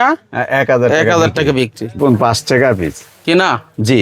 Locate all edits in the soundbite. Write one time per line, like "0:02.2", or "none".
0:01.9